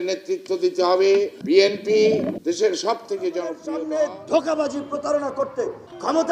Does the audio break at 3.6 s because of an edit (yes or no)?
yes